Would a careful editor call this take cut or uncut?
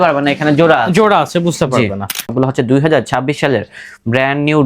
cut